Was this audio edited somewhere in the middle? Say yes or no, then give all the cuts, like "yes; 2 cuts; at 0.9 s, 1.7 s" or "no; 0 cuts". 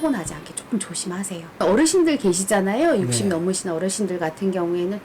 yes; 1 cut; at 1.6 s